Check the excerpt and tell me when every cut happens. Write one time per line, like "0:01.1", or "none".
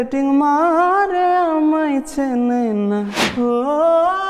0:03.2